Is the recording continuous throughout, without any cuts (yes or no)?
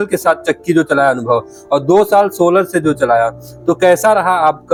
yes